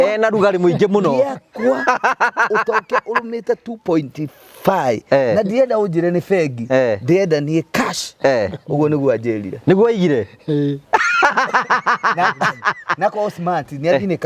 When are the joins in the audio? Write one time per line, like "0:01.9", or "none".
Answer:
none